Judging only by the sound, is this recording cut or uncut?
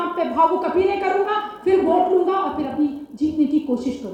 uncut